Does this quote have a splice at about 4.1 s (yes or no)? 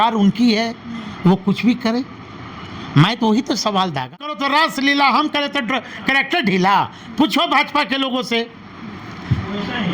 yes